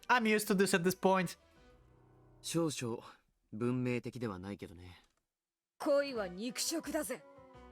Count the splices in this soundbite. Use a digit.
0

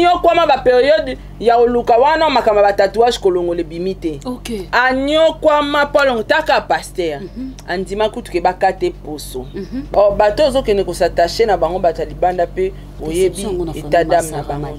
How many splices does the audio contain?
1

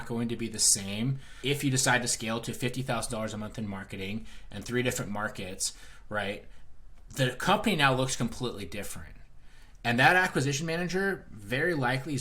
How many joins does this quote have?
1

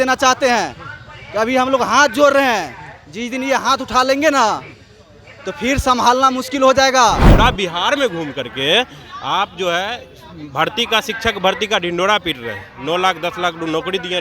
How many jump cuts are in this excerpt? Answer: 1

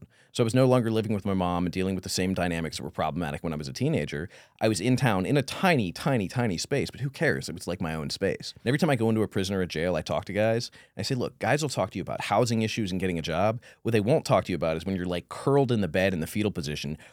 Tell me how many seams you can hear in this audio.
1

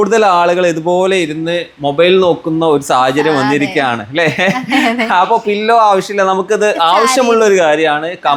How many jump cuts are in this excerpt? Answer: 0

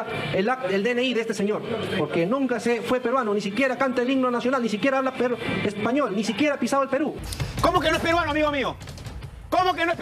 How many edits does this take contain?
1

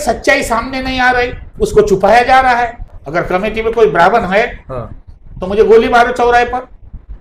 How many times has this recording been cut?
1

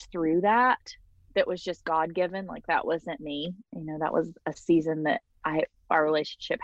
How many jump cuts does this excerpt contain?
1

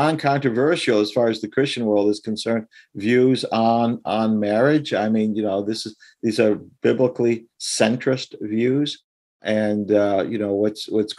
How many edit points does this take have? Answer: 1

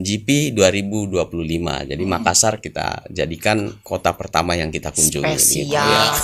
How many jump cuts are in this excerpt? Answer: 0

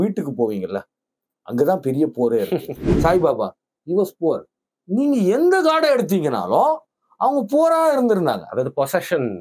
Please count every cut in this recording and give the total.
1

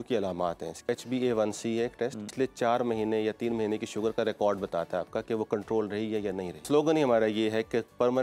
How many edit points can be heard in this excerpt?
3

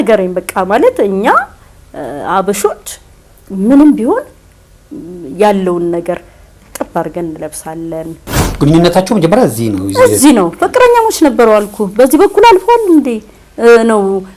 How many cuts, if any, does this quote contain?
1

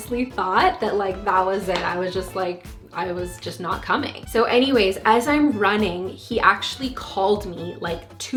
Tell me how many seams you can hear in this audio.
0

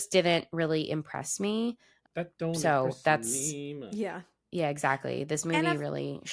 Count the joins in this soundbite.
1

